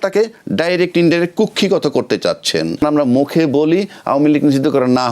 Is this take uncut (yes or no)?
no